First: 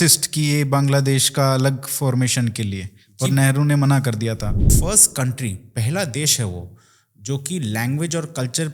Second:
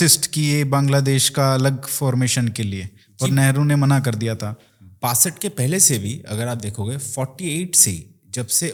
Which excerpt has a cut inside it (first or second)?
first